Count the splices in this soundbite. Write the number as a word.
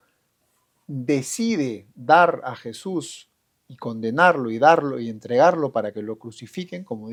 zero